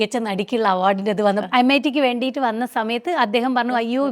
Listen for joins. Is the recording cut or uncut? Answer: cut